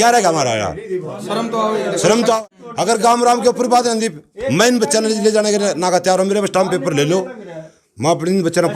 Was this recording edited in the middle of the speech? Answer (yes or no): yes